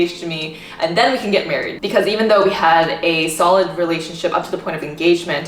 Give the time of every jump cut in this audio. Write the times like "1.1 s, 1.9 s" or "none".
none